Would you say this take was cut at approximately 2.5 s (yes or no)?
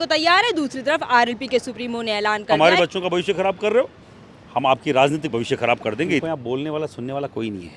yes